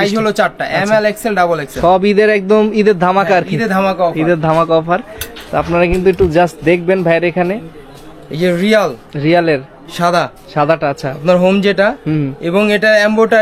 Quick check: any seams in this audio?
no; 0 cuts

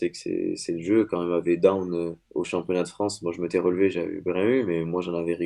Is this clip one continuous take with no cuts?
no; 1 cut; at 2.2 s

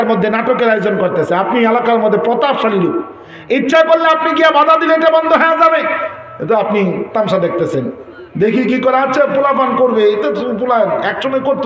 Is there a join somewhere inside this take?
no; 0 cuts

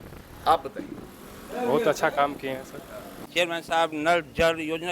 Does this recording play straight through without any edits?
no; 1 cut; at 3.3 s

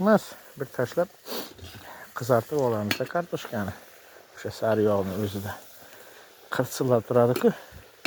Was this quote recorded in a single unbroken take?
yes; 0 cuts

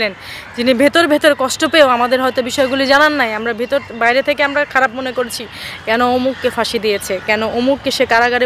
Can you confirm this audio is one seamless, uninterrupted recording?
yes; 0 cuts

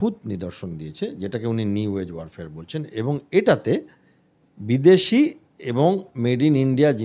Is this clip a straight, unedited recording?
yes; 0 cuts

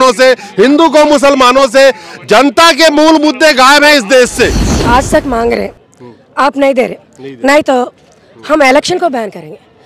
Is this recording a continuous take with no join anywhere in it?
no; 1 cut; at 4.7 s

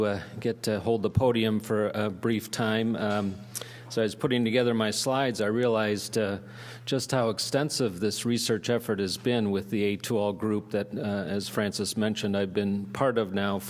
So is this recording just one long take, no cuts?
no; 1 cut; at 8.1 s

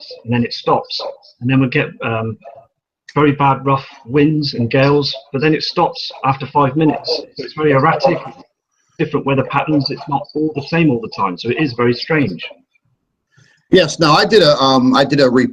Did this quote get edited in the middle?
yes; 1 cut; at 12.4 s

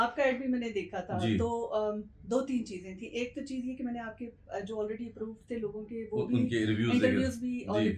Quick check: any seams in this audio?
no; 0 cuts

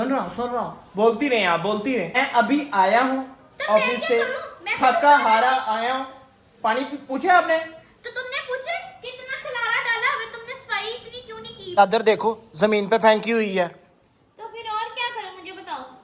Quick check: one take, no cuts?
no; 2 cuts; at 2.2 s, 11.8 s

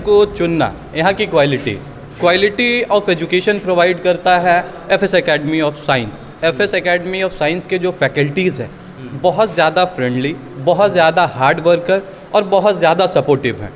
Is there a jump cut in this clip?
no; 0 cuts

